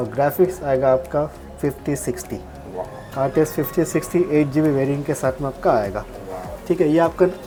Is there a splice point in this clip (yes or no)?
no